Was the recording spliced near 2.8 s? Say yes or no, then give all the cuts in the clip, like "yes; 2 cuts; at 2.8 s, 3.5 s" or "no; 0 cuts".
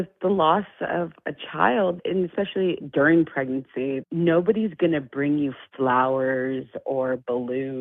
yes; 1 cut; at 2.8 s